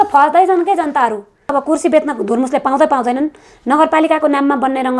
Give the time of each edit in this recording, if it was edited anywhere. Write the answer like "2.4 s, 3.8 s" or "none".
1.5 s

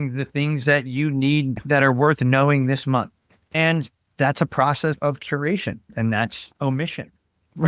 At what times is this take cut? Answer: 3.4 s, 5.0 s

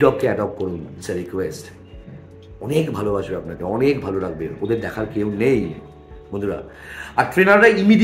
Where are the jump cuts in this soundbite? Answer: none

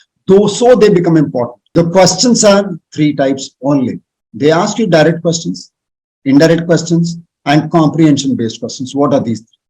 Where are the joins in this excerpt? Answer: 1.6 s

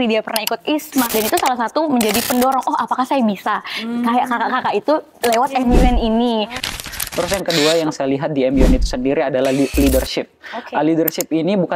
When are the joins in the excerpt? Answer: 1.1 s, 6.8 s

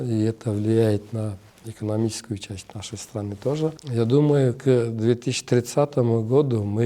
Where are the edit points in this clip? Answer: 3.8 s

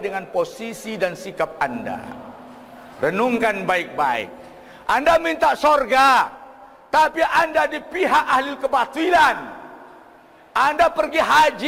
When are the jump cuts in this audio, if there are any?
none

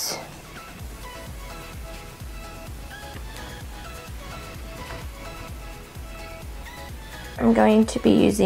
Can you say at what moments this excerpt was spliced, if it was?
5.3 s

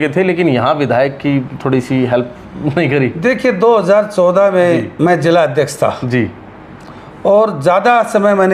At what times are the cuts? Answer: none

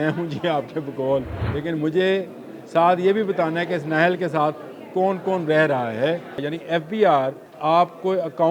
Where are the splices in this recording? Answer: 1.4 s, 6.5 s, 7.5 s

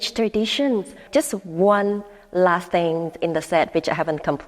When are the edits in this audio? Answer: 1.0 s

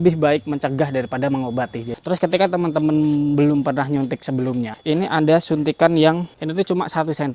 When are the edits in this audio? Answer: 1.9 s, 4.8 s, 6.4 s

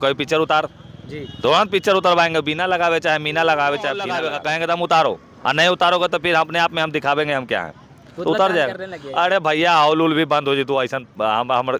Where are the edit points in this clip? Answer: 4.3 s

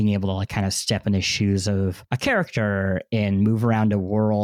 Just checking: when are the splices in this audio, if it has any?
2.0 s

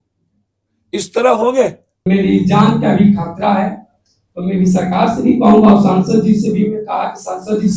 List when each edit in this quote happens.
2.1 s

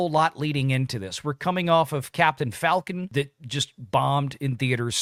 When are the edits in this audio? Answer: none

